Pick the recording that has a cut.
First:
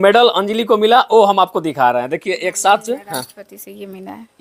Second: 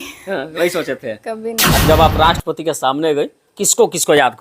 second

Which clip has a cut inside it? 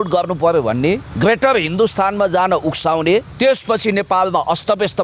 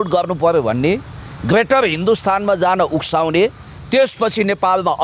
first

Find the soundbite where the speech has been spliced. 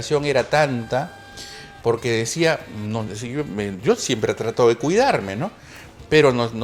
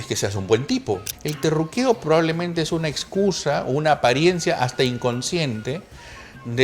second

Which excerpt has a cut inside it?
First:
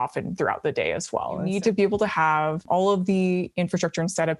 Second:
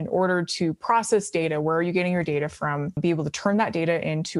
first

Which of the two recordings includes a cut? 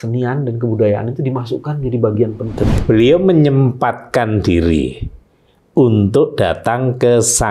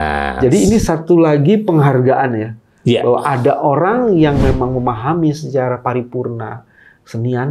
first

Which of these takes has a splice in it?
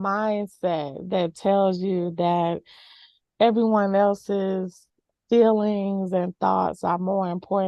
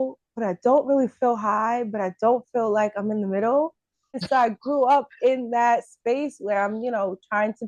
second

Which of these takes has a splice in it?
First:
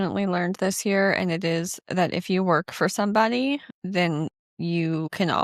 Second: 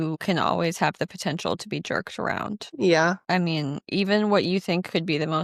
first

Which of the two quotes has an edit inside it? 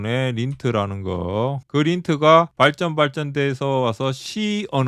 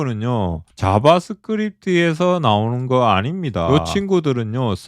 second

